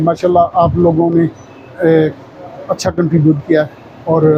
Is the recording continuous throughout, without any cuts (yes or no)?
yes